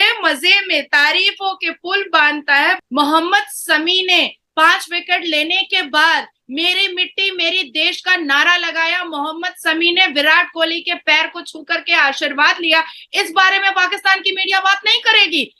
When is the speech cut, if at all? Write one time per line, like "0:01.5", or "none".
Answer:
0:02.8